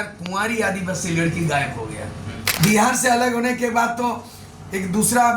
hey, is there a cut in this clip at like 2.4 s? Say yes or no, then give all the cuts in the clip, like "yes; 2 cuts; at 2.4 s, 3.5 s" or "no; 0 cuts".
yes; 1 cut; at 2.4 s